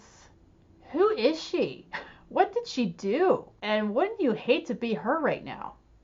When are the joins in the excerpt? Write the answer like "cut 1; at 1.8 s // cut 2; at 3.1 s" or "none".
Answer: cut 1; at 3.5 s